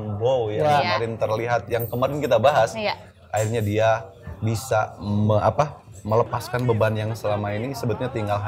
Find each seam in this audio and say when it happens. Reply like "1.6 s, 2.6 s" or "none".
none